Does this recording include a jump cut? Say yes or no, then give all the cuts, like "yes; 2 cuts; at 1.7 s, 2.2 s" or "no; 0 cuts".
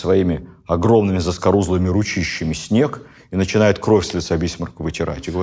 no; 0 cuts